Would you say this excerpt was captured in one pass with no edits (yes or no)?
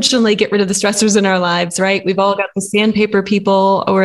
yes